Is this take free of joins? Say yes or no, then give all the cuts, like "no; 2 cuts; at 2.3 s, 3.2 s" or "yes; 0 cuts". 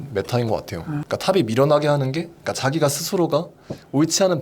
no; 1 cut; at 1.0 s